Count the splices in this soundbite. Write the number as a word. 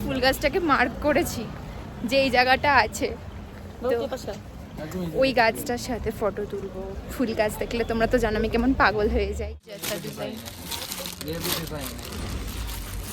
one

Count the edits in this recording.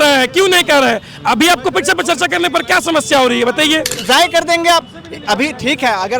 one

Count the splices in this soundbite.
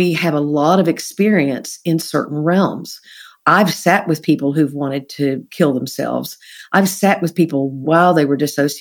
one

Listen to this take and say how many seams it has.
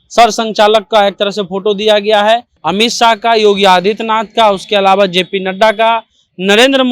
one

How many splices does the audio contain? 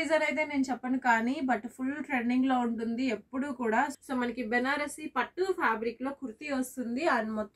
one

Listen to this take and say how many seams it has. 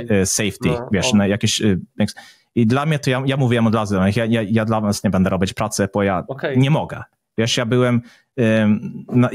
one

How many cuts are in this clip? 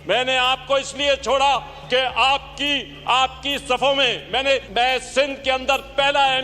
one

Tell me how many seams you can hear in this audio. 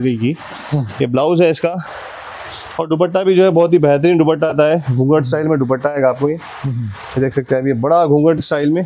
zero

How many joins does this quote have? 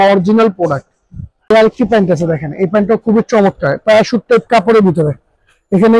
one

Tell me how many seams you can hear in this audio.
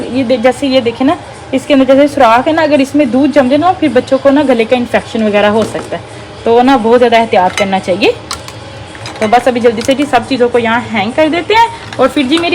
zero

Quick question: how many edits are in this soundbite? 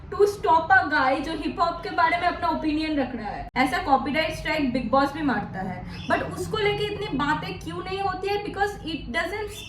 one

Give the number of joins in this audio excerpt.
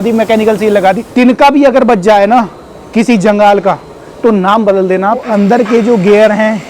two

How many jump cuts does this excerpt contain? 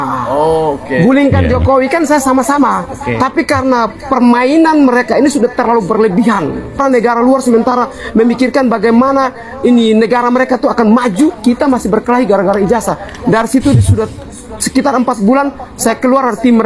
one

